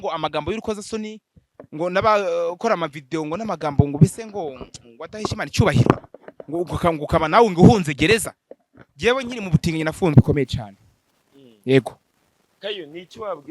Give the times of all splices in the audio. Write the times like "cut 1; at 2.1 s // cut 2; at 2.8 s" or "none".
cut 1; at 10.1 s